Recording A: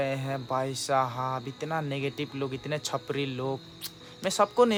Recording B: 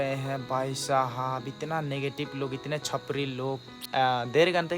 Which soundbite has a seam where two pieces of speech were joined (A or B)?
B